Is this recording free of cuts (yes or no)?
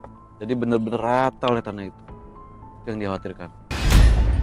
no